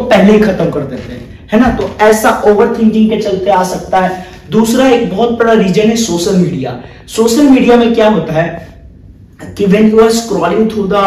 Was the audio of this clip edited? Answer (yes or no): no